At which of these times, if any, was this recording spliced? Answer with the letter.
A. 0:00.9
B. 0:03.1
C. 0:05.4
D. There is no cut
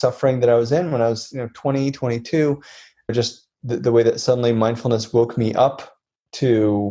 B